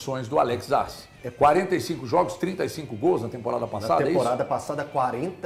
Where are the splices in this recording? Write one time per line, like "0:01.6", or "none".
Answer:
none